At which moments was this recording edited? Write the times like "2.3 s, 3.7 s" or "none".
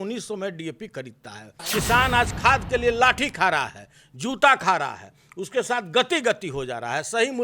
1.6 s